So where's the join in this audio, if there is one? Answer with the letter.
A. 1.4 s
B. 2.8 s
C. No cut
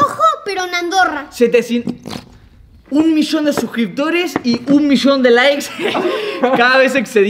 B